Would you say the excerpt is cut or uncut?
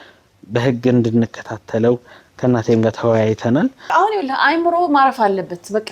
cut